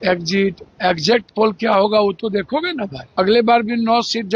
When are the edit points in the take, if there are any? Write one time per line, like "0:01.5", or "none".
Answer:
0:03.0